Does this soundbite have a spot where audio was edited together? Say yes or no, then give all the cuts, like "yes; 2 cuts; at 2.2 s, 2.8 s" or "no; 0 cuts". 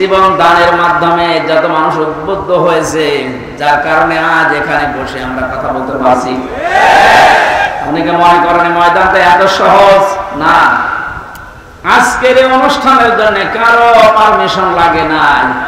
no; 0 cuts